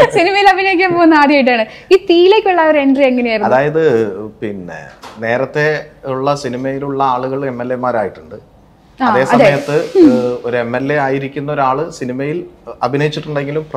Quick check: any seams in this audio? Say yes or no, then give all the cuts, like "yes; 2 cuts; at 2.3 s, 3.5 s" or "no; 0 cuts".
no; 0 cuts